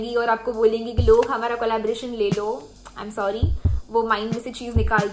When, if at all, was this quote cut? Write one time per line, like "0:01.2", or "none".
none